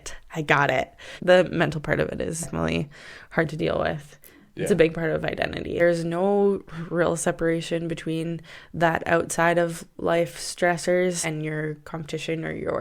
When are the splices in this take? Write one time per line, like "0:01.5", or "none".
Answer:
0:01.2
0:02.5
0:05.8
0:11.2